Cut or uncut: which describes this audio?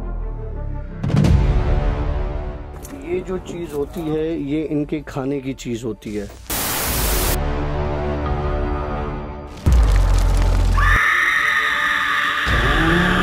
uncut